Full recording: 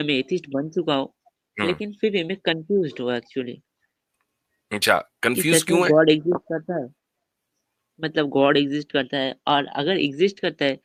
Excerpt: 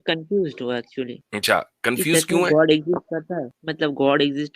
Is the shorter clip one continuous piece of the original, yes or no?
no